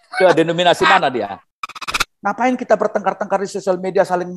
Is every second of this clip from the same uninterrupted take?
no; 1 cut; at 1.8 s

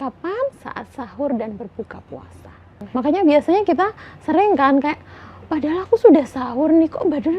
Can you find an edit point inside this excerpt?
yes; 1 cut; at 2.8 s

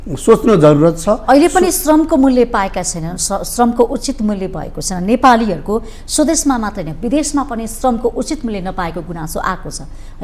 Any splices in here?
no; 0 cuts

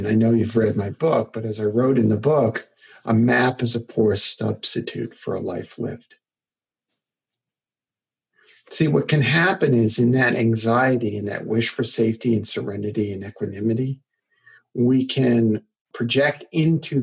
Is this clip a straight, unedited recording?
no; 1 cut; at 15.8 s

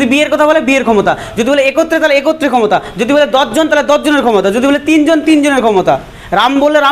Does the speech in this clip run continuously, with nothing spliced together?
yes; 0 cuts

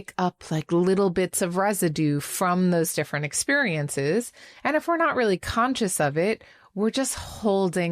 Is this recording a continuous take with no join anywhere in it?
yes; 0 cuts

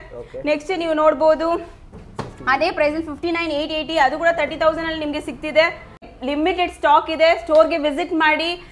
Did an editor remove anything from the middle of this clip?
yes; 1 cut; at 6.0 s

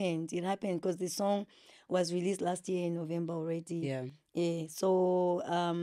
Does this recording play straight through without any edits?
yes; 0 cuts

